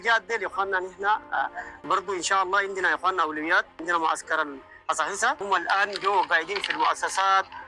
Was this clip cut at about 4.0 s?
no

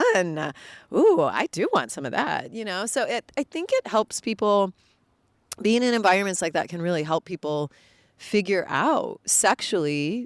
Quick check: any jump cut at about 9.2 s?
yes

